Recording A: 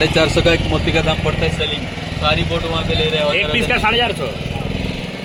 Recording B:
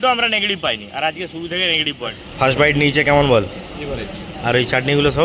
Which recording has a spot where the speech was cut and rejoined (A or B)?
B